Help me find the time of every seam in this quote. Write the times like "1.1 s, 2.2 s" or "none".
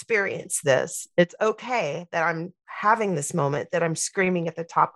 none